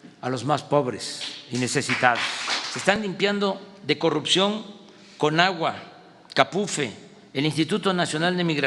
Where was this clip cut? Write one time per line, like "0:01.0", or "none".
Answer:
0:03.0